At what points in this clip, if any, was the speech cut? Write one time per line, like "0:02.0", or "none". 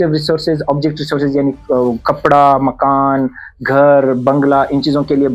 none